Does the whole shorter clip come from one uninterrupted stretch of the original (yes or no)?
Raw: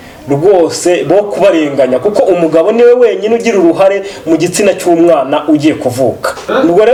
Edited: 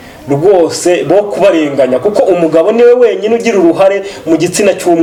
yes